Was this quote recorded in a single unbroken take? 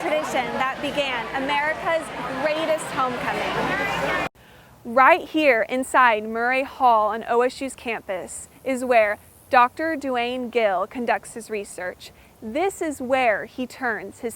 no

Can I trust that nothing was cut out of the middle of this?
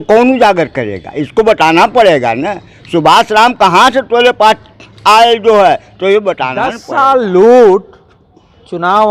no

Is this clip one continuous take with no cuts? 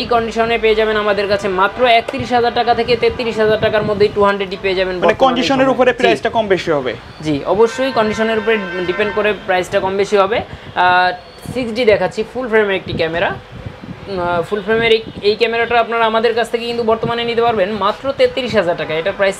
yes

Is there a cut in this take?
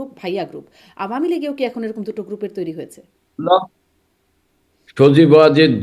no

